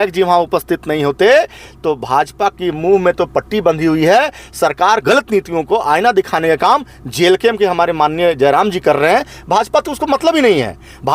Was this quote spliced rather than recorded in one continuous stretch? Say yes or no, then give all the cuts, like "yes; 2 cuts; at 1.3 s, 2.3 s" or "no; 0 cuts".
yes; 1 cut; at 5.0 s